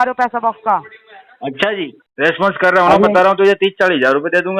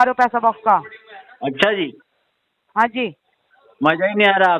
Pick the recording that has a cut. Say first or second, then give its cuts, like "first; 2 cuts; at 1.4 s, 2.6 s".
first; 1 cut; at 2.0 s